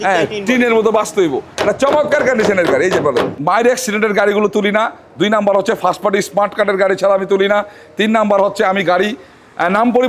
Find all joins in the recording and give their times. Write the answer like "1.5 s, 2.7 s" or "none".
1.5 s, 3.3 s